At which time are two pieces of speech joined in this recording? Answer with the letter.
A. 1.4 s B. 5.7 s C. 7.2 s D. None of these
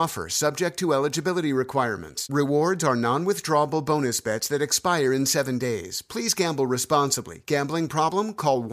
D